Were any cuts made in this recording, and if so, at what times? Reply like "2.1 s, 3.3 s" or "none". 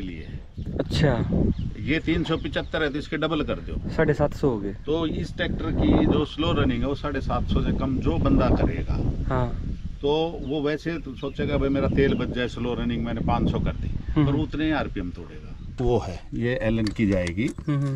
15.7 s